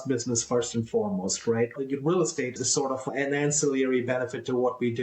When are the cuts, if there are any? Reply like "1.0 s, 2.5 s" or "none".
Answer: 1.7 s, 3.0 s